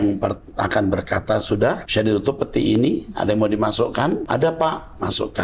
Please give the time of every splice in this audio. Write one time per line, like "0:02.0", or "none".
0:01.8
0:04.2